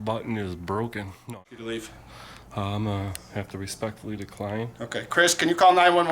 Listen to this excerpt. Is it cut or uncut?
cut